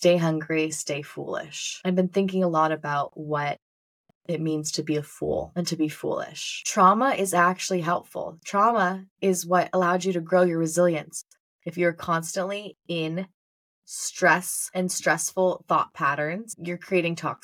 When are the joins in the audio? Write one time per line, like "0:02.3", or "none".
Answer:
0:06.7
0:11.6